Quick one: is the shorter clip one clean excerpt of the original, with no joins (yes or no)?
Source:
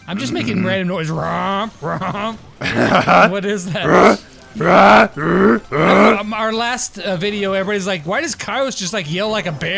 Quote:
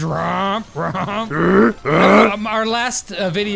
no